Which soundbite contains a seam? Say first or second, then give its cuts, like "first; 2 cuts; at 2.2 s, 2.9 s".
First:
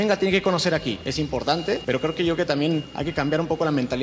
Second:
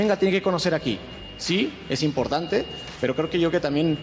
first; 2 cuts; at 1.5 s, 3.0 s